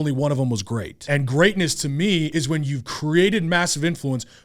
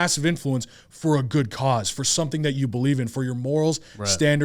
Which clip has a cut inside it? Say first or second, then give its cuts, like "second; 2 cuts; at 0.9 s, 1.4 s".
first; 2 cuts; at 1.0 s, 2.3 s